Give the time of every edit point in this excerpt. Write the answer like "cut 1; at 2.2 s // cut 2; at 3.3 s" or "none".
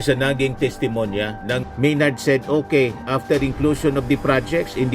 cut 1; at 1.7 s